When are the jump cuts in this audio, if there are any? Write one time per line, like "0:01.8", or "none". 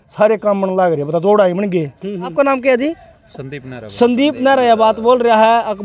0:02.3